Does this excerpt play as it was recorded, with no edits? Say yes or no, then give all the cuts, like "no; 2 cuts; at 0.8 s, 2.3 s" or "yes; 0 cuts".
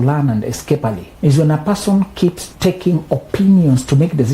no; 2 cuts; at 1.1 s, 2.5 s